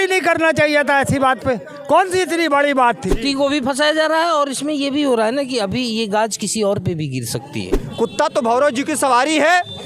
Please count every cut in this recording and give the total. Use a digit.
2